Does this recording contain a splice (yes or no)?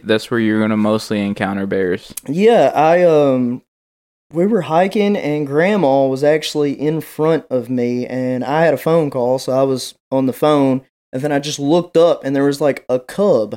no